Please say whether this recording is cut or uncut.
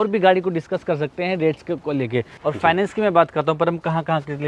cut